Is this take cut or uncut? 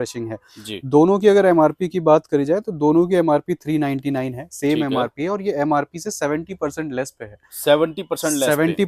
uncut